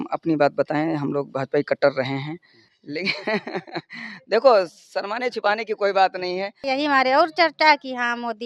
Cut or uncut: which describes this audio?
cut